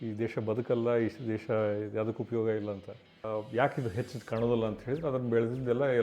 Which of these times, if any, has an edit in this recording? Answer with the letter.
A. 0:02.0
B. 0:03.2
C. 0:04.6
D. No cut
B